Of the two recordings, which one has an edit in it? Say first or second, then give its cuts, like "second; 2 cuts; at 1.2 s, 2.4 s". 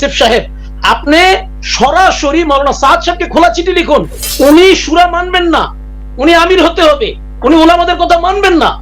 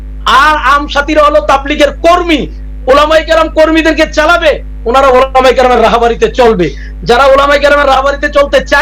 first; 1 cut; at 4.2 s